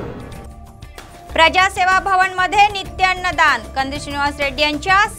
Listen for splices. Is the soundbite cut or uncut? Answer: cut